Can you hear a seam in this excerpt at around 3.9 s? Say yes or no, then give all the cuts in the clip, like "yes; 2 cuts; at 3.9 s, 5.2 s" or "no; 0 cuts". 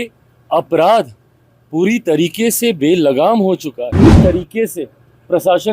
yes; 1 cut; at 3.9 s